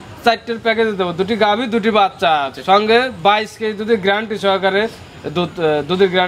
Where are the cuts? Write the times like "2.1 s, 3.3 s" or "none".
none